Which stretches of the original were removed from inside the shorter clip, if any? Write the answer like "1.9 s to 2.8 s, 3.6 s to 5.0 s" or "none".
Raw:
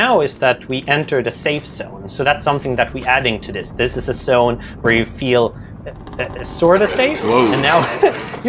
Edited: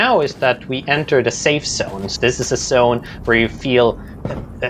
2.0 s to 3.6 s